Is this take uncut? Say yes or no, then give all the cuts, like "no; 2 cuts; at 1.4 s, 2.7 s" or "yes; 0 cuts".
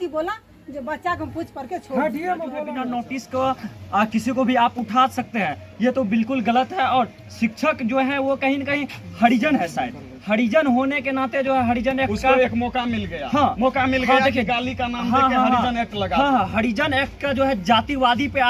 no; 1 cut; at 2.7 s